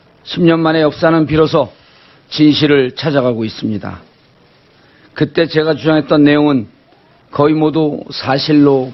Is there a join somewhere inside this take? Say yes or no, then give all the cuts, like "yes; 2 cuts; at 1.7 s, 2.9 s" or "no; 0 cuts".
no; 0 cuts